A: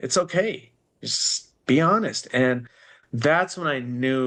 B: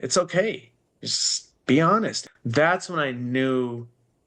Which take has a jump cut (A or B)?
B